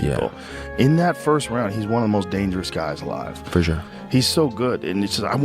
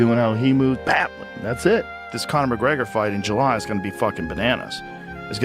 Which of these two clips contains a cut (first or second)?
second